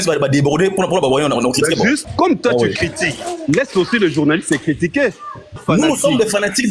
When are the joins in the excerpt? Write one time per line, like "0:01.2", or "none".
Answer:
0:02.0
0:05.6